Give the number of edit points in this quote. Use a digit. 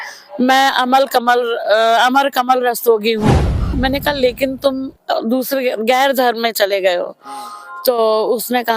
1